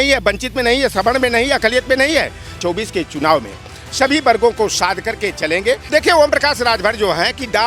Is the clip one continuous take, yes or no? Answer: no